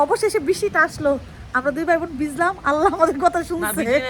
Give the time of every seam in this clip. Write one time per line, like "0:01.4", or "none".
none